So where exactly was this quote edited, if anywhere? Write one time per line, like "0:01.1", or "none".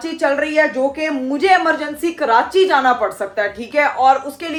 none